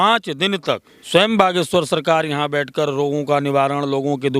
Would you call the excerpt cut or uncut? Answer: cut